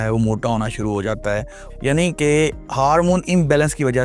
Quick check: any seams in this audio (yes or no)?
yes